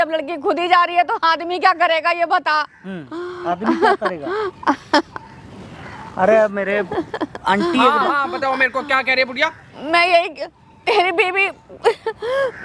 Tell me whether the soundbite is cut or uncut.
uncut